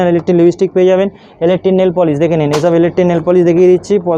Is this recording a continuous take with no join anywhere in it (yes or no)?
yes